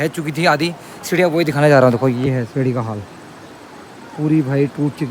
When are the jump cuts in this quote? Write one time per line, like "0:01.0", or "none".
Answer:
none